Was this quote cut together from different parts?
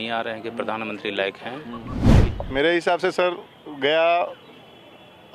yes; 1 cut; at 1.9 s

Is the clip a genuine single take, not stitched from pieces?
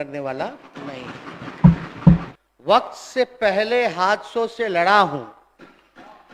no; 1 cut; at 2.2 s

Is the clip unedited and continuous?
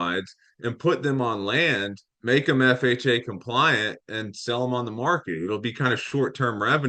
yes; 0 cuts

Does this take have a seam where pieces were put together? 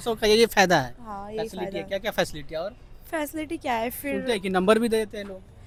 no; 0 cuts

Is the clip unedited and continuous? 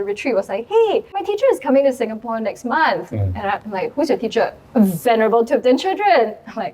no; 2 cuts; at 1.2 s, 4.6 s

